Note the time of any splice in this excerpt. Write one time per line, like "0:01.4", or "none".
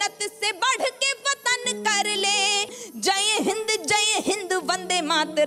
0:02.6

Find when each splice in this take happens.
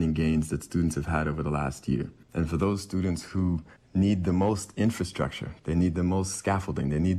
0:02.2
0:03.8

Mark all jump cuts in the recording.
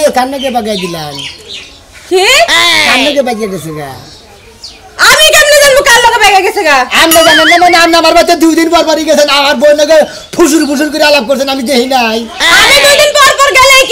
none

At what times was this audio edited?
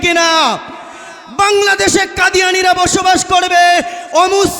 0:01.2

